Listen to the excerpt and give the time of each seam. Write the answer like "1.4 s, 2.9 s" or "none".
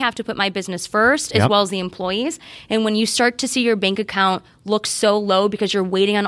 none